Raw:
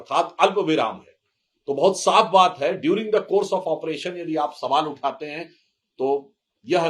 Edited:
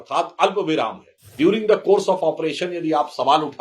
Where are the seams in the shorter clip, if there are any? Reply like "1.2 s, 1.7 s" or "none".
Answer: 1.3 s